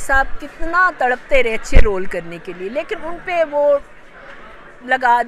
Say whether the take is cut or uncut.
uncut